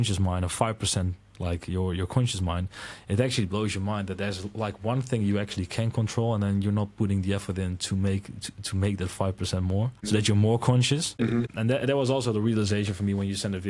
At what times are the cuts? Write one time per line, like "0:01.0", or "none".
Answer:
0:10.0
0:11.4